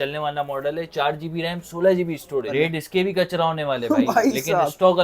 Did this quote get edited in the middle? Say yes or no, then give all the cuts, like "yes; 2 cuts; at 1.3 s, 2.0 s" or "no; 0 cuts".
yes; 1 cut; at 2.4 s